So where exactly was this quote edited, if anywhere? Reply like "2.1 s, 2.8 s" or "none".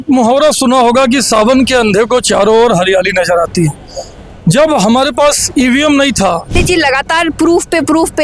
6.6 s